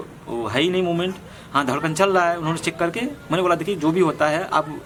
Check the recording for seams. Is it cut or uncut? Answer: uncut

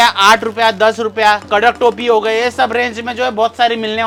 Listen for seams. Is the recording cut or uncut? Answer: uncut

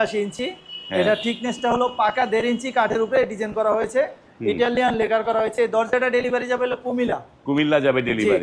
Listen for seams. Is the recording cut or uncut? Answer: uncut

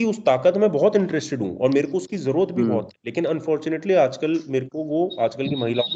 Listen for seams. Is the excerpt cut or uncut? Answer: uncut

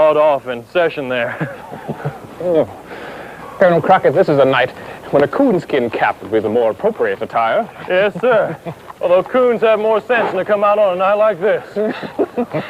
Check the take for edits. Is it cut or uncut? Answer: cut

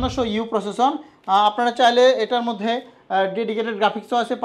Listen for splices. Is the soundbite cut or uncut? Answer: uncut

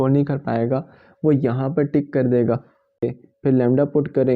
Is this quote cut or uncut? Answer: cut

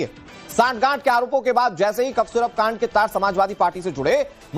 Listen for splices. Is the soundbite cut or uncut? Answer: cut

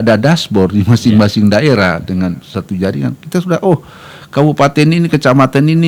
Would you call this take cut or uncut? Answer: uncut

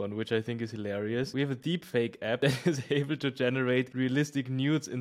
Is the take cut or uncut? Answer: cut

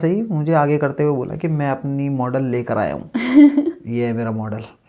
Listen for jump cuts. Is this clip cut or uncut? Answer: uncut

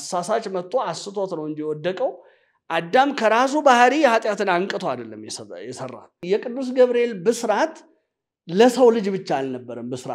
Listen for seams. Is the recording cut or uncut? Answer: cut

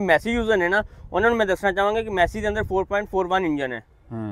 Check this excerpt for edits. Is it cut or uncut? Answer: uncut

